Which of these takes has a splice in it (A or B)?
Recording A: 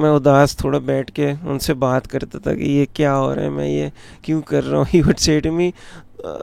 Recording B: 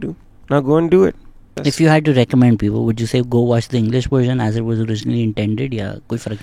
B